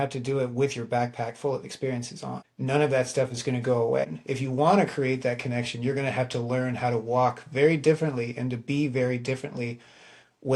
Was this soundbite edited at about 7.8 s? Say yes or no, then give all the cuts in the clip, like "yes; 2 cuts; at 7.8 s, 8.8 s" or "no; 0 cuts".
no; 2 cuts; at 2.5 s, 4.2 s